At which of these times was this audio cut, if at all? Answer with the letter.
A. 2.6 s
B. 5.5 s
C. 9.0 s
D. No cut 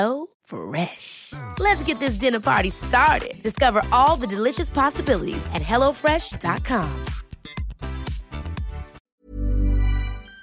C